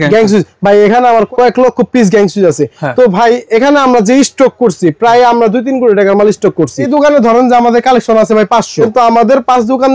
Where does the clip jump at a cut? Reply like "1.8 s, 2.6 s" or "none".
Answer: 1.3 s, 6.9 s, 8.8 s